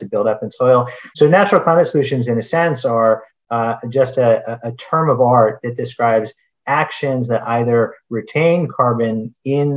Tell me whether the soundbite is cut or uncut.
cut